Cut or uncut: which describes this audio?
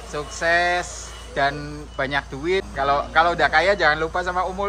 cut